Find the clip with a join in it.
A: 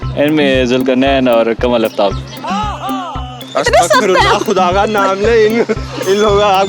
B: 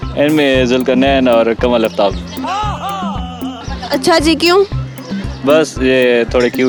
A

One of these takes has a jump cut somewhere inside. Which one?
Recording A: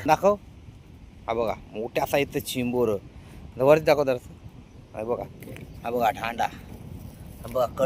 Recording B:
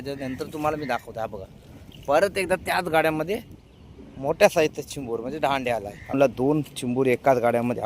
B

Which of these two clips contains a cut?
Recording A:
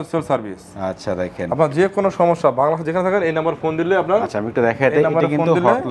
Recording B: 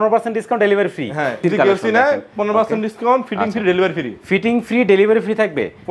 B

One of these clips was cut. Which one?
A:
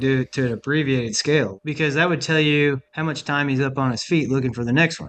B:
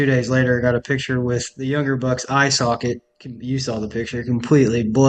A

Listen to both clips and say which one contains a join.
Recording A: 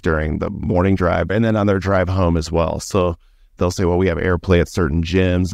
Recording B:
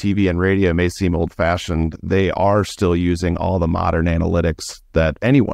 A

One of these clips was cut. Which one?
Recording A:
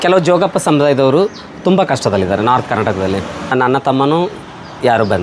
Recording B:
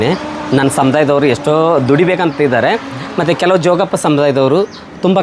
A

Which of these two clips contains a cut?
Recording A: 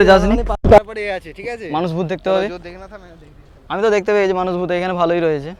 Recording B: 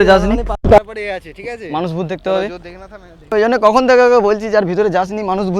B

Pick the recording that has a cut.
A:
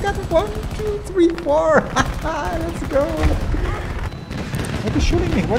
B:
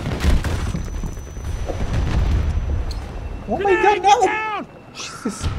A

